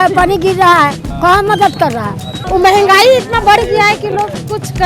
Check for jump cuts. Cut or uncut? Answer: cut